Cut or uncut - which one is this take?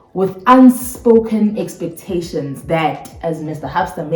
uncut